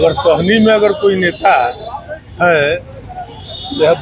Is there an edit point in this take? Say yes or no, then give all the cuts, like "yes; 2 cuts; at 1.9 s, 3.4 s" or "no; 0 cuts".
no; 0 cuts